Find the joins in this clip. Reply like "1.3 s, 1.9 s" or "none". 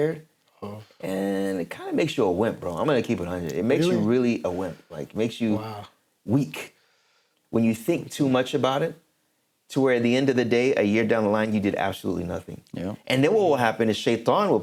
none

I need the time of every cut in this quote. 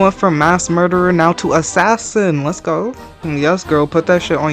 3.2 s

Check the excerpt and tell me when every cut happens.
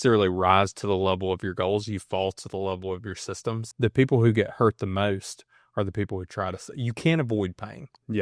3.7 s

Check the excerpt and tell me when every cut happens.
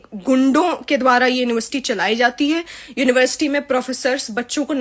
none

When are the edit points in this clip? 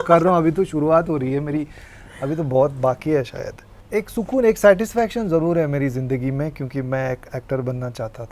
none

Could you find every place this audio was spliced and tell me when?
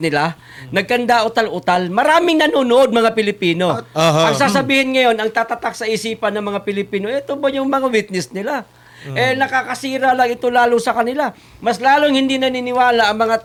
none

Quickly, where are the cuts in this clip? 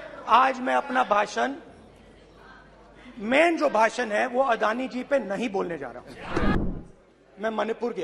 6.5 s

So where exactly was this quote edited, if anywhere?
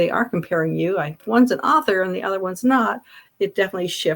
1.2 s

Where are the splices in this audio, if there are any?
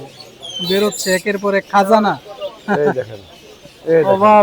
none

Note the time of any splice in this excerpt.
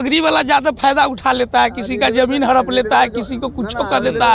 none

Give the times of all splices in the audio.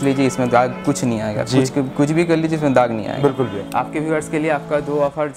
3.6 s

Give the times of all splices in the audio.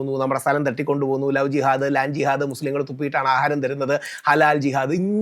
none

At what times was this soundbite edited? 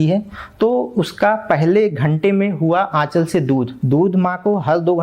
3.8 s

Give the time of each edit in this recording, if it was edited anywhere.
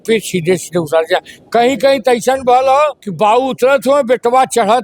3.0 s

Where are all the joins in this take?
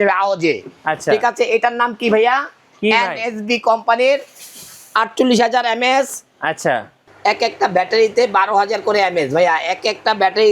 6.9 s

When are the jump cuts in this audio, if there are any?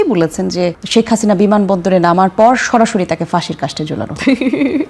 none

